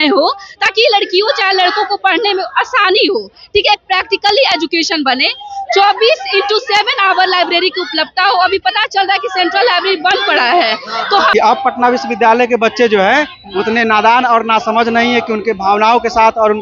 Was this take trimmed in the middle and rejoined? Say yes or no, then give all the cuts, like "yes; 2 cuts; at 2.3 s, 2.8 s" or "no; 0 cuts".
yes; 1 cut; at 11.3 s